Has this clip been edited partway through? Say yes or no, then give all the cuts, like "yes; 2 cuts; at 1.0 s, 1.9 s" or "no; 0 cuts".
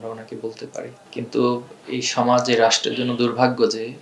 yes; 1 cut; at 1.0 s